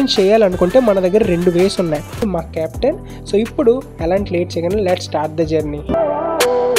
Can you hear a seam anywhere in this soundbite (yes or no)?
yes